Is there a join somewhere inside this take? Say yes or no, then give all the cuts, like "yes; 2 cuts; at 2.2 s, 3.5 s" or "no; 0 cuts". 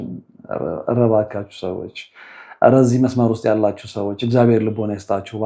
no; 0 cuts